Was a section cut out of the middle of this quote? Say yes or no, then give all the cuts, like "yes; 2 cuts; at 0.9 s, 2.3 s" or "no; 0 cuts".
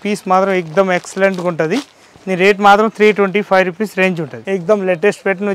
no; 0 cuts